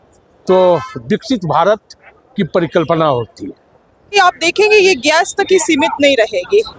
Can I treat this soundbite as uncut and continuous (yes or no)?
no